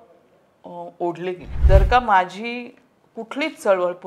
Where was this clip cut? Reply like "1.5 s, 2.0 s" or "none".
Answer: 1.5 s